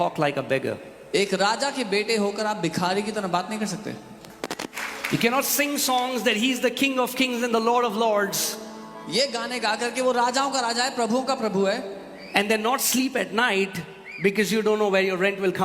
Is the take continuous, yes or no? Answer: no